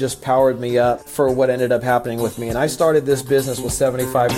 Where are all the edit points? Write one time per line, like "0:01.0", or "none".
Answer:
none

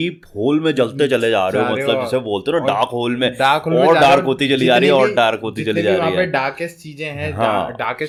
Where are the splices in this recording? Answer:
none

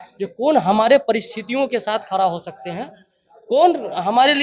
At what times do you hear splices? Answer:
none

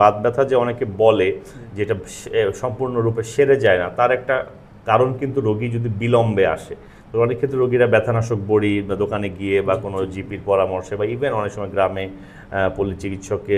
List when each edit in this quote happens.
none

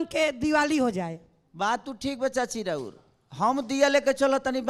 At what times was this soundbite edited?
none

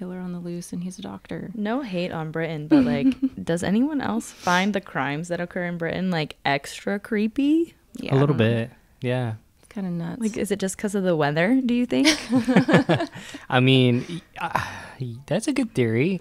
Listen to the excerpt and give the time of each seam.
none

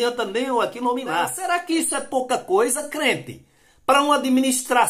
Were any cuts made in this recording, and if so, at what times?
0:01.4

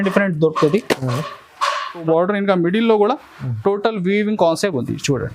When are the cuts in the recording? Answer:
0:02.0

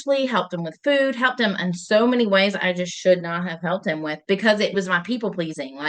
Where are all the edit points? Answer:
0:04.7

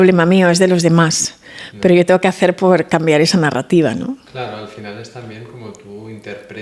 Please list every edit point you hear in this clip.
none

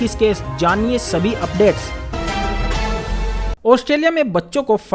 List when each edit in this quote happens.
0:02.0
0:03.1

